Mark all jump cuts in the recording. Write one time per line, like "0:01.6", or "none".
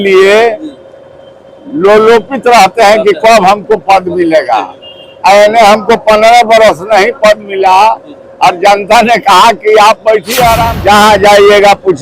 0:10.7